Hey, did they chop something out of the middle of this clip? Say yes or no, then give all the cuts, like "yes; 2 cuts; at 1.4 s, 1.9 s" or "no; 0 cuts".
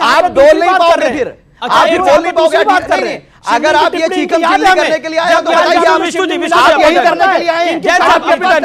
no; 0 cuts